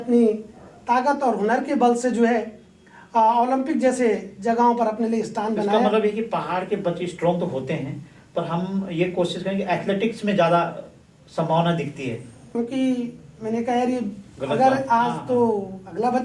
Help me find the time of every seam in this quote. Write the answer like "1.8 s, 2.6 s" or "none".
12.5 s